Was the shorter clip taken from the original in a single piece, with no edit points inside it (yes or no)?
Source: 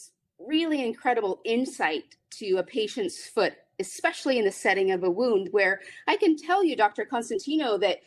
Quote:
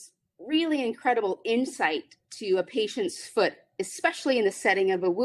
yes